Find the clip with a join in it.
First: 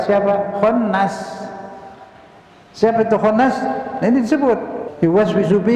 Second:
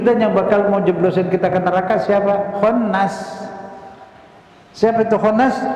first; 1 cut; at 4.8 s

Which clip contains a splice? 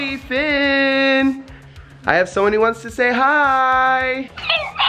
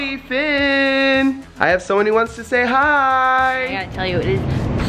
second; 2 cuts; at 1.5 s, 3.9 s

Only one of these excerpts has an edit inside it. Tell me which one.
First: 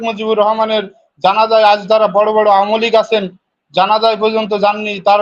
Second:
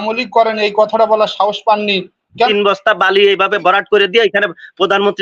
second; 1 cut; at 2.5 s

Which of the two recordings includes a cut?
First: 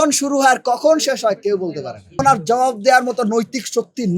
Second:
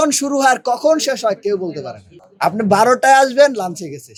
first; 1 cut; at 2.2 s

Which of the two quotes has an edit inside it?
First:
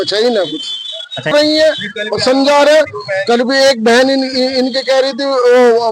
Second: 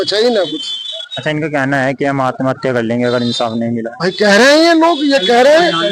first; 1 cut; at 1.3 s

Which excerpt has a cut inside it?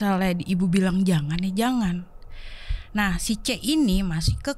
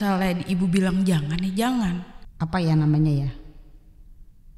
second; 1 cut; at 2.2 s

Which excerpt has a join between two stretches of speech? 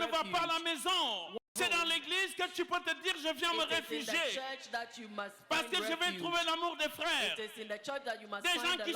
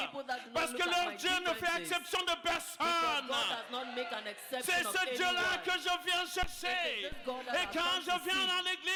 first; 1 cut; at 1.5 s

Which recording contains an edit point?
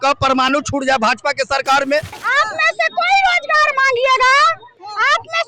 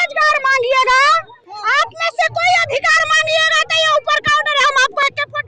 first; 1 cut; at 2.2 s

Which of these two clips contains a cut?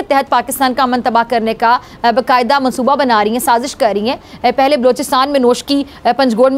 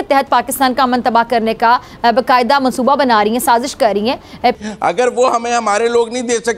second; 1 cut; at 4.5 s

